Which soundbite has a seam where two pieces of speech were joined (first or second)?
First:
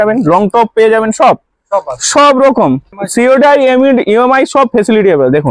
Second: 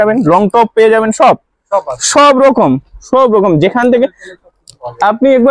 first